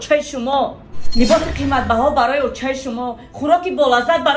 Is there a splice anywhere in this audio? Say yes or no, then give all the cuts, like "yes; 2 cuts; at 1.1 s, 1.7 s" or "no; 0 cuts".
no; 0 cuts